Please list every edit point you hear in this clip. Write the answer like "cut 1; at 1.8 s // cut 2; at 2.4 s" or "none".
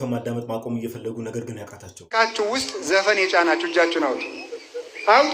cut 1; at 2.1 s